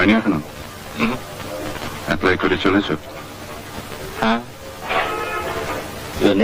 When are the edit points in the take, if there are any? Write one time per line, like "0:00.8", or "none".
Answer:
none